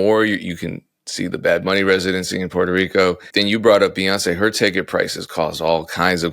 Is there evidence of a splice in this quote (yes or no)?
yes